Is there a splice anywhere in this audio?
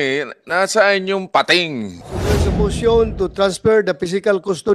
yes; 1 cut; at 2.3 s

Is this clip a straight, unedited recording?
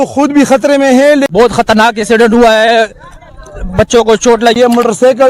no; 2 cuts; at 1.3 s, 4.6 s

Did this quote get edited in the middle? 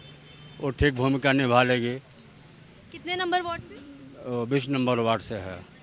no; 0 cuts

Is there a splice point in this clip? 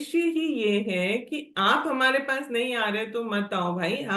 no; 0 cuts

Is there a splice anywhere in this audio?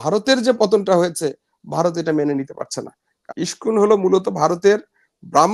yes; 1 cut; at 3.2 s

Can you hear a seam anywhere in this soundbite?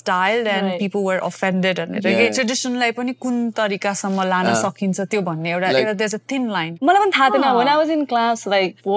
yes; 2 cuts; at 2.3 s, 6.7 s

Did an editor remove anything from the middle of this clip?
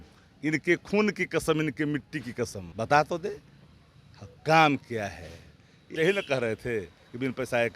yes; 2 cuts; at 2.6 s, 5.9 s

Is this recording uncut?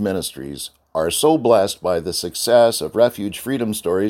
yes; 0 cuts

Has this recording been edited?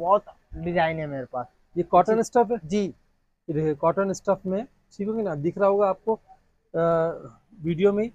no; 0 cuts

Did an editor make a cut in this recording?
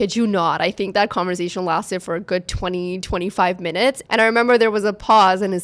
yes; 1 cut; at 4.0 s

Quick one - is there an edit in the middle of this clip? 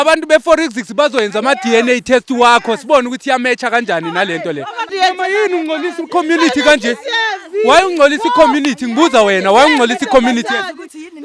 yes; 1 cut; at 4.8 s

